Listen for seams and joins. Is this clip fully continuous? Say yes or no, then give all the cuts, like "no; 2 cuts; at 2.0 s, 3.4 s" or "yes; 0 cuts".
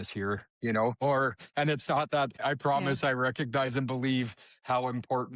no; 2 cuts; at 1.0 s, 2.4 s